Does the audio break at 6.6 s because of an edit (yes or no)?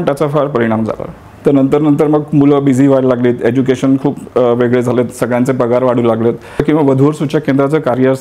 yes